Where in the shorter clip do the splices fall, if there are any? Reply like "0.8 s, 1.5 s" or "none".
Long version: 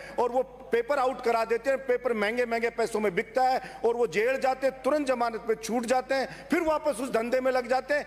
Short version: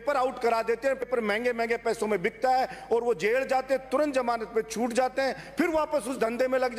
1.0 s